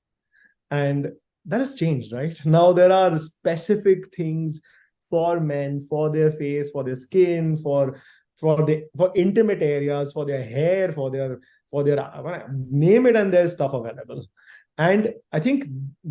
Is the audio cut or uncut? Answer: uncut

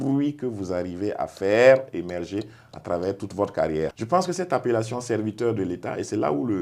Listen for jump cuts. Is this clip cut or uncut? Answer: cut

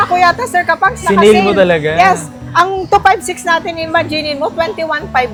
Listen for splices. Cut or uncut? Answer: uncut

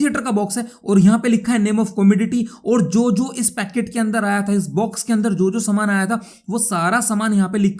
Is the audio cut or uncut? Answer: uncut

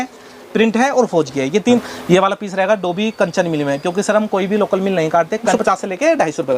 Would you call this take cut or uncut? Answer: cut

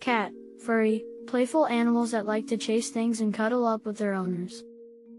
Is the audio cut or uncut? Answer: uncut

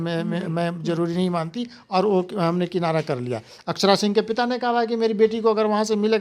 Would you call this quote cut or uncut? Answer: uncut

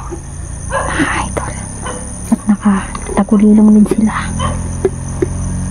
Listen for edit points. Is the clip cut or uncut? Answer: uncut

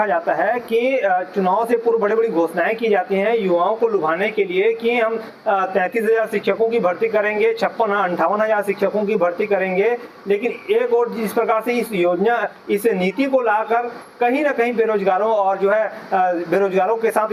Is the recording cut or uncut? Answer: uncut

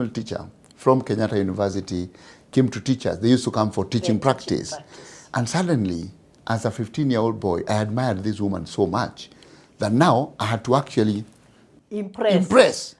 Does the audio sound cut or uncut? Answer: uncut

